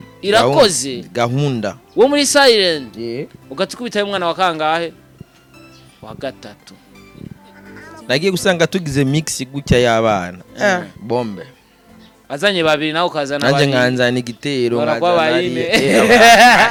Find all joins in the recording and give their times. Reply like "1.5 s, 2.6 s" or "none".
none